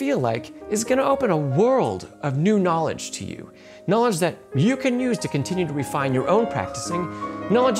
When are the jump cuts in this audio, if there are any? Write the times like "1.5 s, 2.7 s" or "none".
none